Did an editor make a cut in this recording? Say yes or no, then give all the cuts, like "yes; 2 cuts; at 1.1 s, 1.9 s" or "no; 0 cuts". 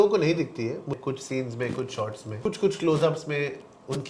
yes; 2 cuts; at 0.9 s, 2.4 s